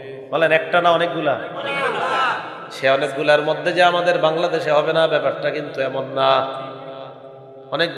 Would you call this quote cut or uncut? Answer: uncut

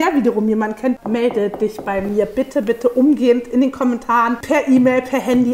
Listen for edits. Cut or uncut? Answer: cut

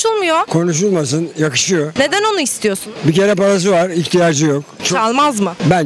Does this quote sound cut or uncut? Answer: uncut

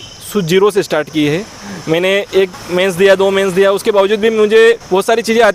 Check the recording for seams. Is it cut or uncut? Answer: uncut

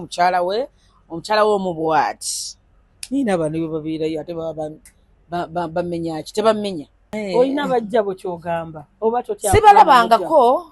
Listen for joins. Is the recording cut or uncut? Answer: uncut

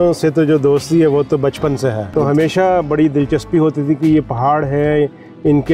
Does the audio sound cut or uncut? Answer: cut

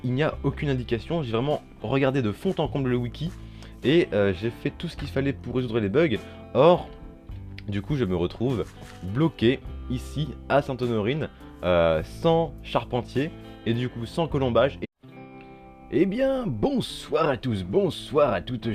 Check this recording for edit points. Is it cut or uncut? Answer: uncut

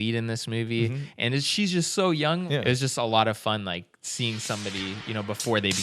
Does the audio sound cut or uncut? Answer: cut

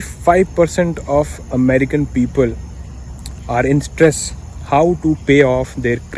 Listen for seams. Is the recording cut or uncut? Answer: uncut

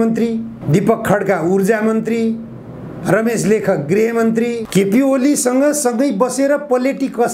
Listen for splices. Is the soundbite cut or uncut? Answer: cut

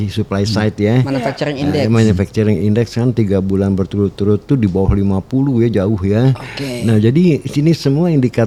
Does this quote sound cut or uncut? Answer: uncut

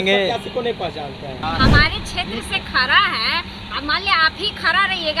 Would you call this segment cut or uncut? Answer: cut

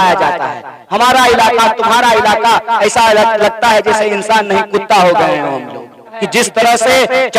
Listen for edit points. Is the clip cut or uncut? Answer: cut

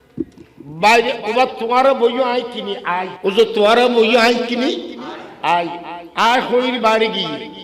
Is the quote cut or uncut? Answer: cut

